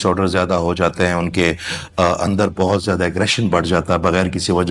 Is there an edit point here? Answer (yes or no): no